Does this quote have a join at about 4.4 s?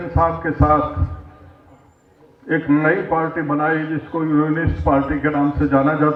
no; 0 cuts

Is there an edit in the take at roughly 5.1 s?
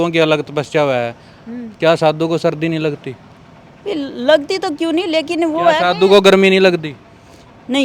no; 0 cuts

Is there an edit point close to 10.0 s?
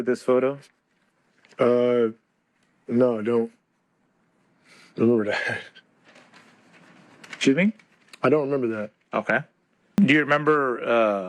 yes; 1 cut; at 10.0 s

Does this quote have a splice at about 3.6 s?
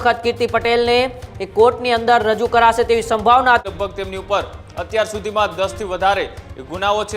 yes; 1 cut; at 3.6 s

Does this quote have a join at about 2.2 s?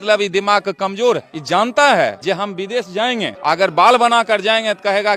yes; 3 cuts; at 1.3 s, 2.2 s, 3.3 s

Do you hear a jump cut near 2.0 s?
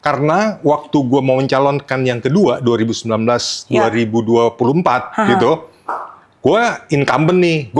no; 0 cuts

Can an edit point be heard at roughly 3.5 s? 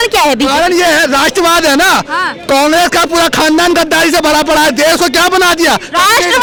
no; 0 cuts

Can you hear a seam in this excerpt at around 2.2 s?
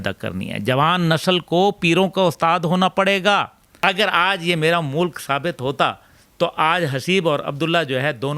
no; 1 cut; at 3.6 s

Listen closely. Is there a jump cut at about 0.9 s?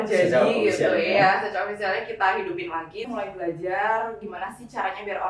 no; 1 cut; at 3.1 s

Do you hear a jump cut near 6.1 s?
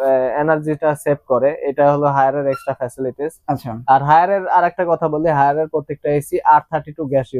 no; 0 cuts

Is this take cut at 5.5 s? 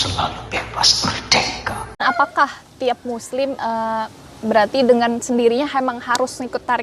no; 1 cut; at 2.0 s

